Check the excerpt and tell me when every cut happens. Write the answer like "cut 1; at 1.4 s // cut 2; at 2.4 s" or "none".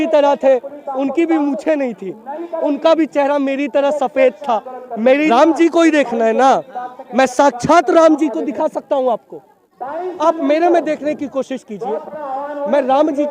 cut 1; at 5.3 s